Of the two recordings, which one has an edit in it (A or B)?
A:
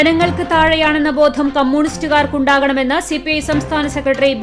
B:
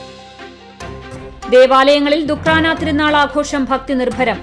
B